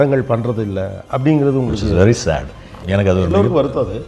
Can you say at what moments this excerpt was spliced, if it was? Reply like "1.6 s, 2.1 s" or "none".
2.8 s